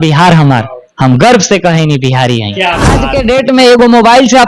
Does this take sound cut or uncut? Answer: cut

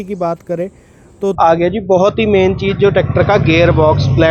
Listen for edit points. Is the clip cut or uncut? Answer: cut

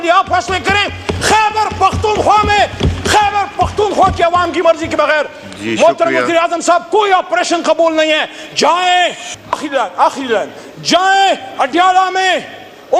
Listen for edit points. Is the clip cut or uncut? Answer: cut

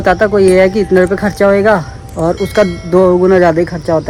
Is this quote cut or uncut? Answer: uncut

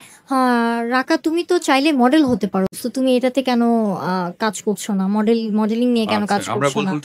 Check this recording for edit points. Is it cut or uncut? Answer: uncut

